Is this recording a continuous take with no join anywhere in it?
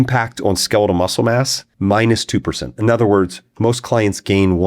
no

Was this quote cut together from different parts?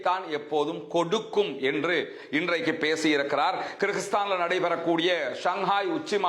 no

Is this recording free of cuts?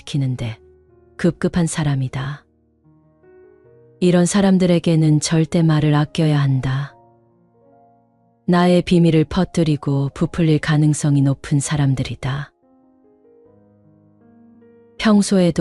no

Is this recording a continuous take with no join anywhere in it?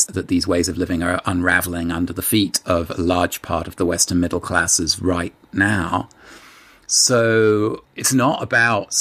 no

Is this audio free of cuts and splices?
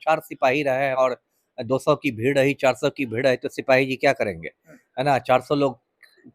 yes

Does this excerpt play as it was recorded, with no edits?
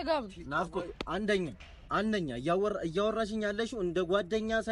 yes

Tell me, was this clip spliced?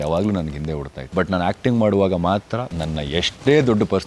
yes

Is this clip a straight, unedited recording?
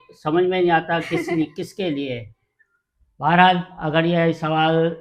yes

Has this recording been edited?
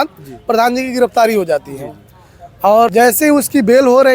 yes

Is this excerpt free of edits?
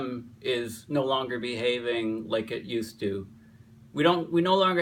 no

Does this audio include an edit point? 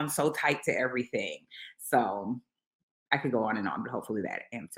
no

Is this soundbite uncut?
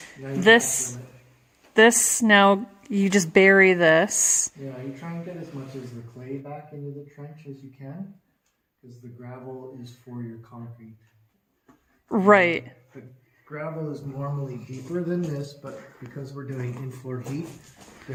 yes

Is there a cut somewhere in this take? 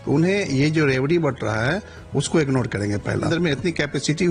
yes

